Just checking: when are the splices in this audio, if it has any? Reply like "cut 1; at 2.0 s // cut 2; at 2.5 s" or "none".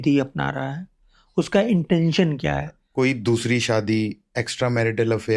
cut 1; at 2.8 s